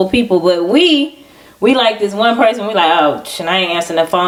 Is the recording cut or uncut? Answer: uncut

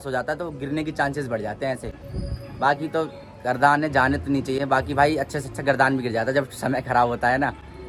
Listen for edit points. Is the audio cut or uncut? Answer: uncut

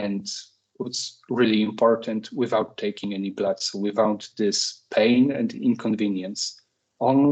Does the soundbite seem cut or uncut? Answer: uncut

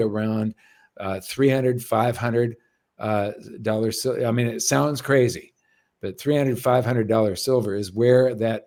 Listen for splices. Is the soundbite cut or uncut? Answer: uncut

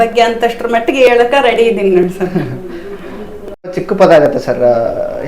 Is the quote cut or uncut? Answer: cut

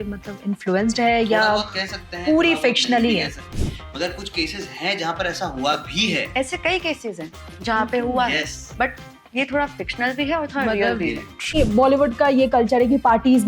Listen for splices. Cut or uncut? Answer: cut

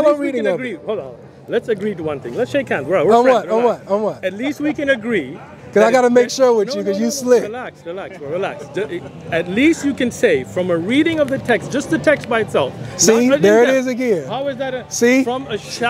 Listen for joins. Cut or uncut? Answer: uncut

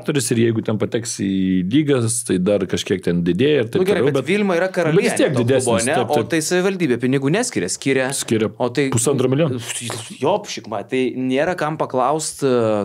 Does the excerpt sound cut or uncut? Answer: uncut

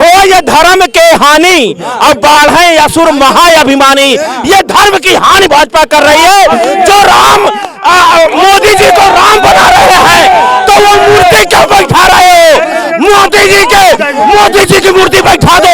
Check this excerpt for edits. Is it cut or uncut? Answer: uncut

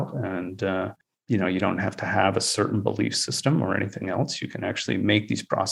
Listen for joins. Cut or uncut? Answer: uncut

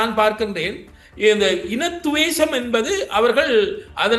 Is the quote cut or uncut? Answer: uncut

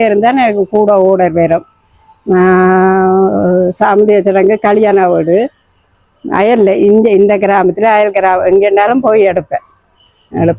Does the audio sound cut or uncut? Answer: uncut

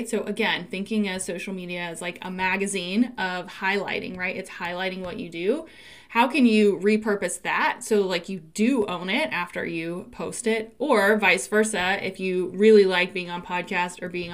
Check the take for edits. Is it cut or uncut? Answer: uncut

